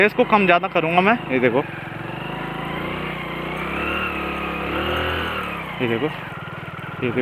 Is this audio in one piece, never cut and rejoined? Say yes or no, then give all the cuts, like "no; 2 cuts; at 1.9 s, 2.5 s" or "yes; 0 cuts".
yes; 0 cuts